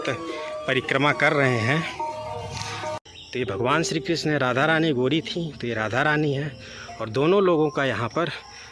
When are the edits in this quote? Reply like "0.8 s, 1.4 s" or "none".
2.9 s